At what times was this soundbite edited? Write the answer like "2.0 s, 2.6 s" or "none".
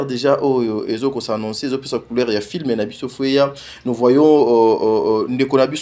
none

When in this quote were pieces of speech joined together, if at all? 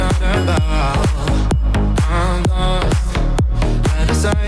none

